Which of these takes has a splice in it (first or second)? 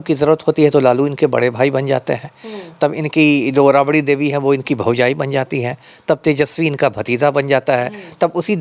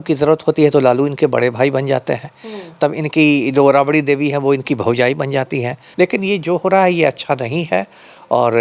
second